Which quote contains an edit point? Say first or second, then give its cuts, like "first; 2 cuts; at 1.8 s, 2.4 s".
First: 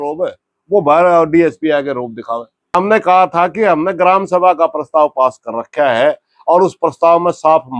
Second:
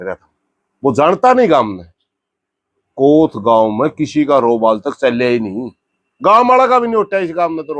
first; 1 cut; at 2.7 s